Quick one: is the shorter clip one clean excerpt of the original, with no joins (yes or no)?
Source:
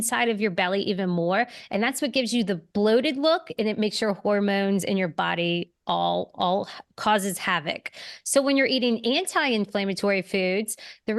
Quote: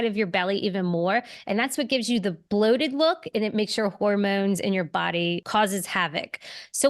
no